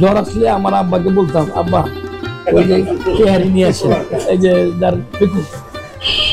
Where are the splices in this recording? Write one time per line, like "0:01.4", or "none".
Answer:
none